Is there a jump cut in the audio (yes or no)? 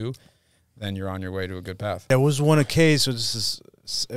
yes